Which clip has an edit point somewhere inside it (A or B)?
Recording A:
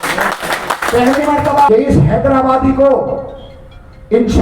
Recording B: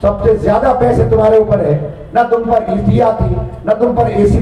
A